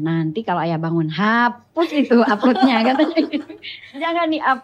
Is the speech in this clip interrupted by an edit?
no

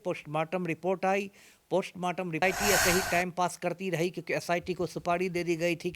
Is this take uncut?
no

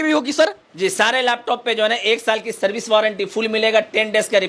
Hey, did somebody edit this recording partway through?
no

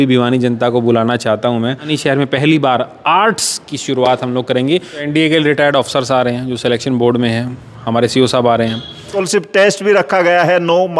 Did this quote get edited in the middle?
yes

